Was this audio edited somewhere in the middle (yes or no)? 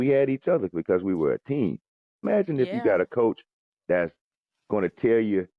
yes